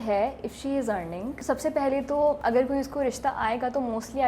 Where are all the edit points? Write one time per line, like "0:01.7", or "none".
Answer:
0:01.3
0:02.4

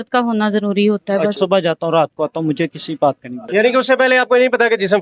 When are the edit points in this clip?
0:01.3
0:03.3

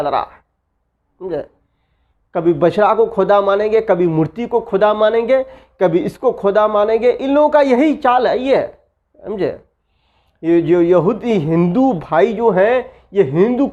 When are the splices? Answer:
none

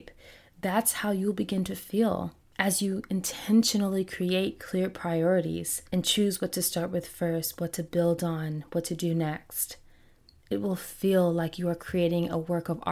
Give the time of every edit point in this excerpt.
0:05.7

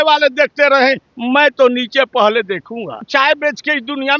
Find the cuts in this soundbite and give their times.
0:03.1

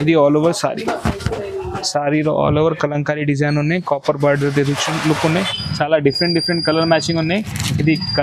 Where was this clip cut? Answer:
0:05.5

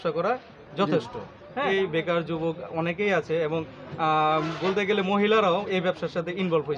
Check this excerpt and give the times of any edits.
0:01.7

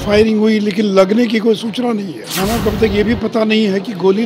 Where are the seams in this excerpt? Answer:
0:02.2

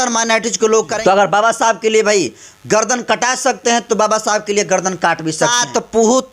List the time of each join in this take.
0:00.9
0:05.5

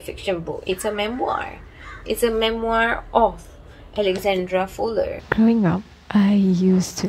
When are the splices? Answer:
0:05.2

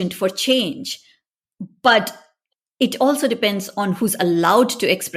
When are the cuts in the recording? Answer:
none

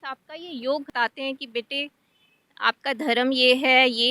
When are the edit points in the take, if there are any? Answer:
0:00.9

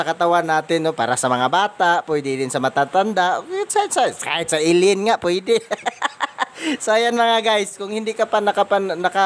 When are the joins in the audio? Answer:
0:07.8

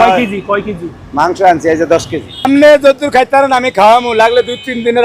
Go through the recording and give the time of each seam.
0:02.5

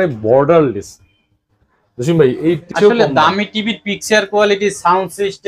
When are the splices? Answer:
0:02.7

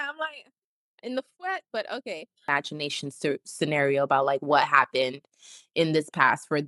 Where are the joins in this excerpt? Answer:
0:02.4

